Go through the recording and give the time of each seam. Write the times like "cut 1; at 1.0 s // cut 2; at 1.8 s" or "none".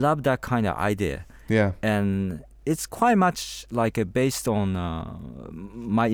none